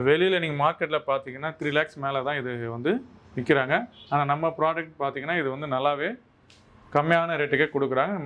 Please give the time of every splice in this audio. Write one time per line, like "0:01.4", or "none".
none